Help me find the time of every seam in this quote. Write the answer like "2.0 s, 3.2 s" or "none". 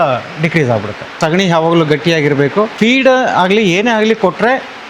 1.1 s, 2.7 s

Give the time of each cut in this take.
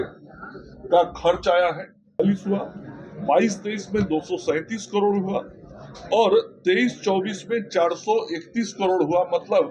2.2 s

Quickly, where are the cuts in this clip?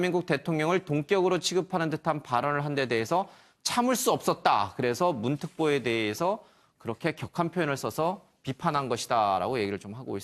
7.5 s

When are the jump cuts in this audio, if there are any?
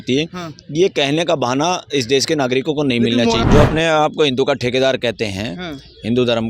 3.4 s

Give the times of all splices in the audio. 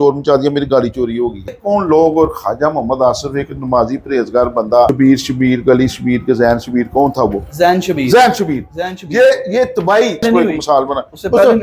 1.6 s, 4.9 s, 10.2 s

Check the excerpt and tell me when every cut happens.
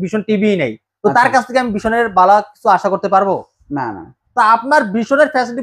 4.2 s

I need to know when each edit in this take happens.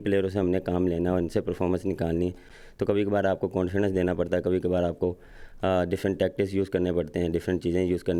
none

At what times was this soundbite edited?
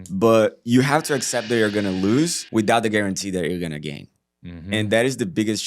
2.4 s

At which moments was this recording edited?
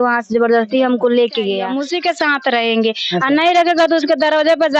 1.7 s

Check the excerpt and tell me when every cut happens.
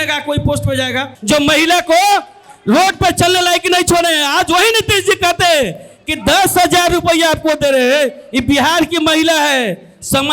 1.1 s

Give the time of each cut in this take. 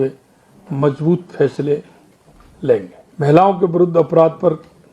3.0 s

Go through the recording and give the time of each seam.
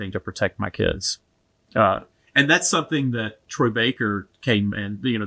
none

